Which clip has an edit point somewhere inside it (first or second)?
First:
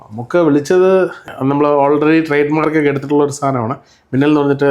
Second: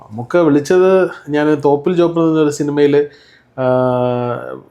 first